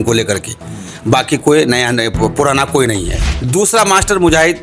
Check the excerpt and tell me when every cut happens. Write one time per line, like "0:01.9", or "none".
0:03.3